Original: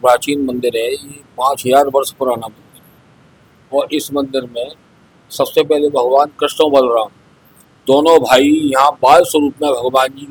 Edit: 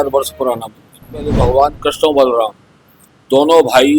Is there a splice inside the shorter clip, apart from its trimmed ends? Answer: yes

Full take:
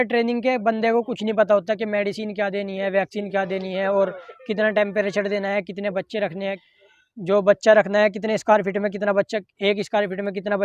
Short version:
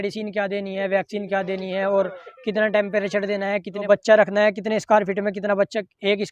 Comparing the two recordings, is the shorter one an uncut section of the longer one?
no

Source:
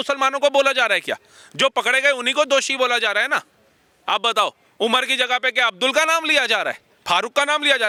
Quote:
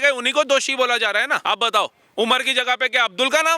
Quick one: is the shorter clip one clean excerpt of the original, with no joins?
no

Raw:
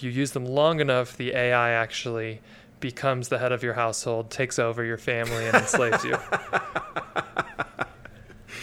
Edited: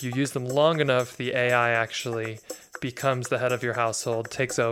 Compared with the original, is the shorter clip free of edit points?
yes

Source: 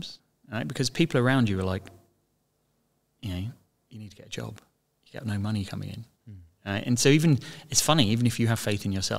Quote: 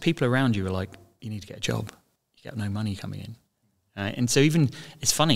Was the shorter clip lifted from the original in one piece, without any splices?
no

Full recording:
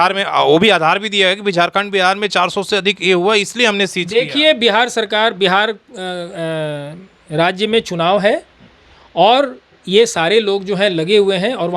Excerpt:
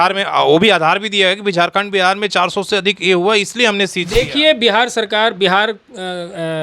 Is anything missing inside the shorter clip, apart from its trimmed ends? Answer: no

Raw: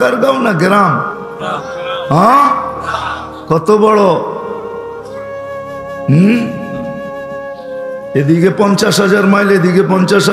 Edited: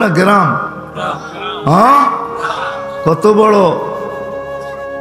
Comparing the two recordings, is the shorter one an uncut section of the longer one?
no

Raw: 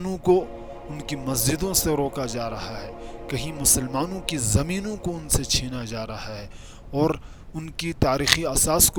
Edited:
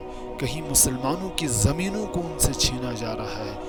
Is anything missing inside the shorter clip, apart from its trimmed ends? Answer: no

